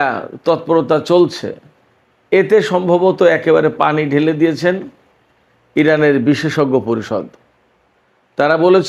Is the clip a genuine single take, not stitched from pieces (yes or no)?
yes